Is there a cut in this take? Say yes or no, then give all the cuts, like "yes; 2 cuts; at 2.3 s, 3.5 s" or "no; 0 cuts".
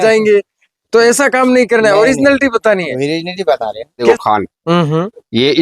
yes; 1 cut; at 4.0 s